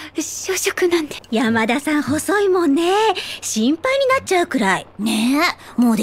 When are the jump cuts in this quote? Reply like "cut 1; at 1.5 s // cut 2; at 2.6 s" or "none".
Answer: cut 1; at 1.2 s